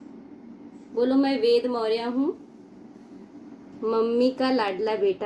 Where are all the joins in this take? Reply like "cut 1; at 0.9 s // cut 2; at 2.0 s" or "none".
none